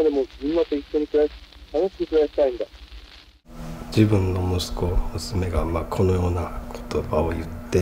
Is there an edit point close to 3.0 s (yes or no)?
yes